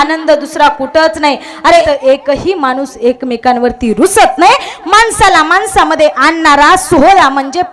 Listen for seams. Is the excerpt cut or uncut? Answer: cut